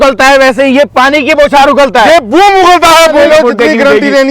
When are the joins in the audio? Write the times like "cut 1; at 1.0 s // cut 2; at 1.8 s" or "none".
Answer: cut 1; at 3.1 s